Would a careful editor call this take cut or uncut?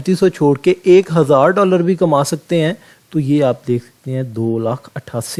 uncut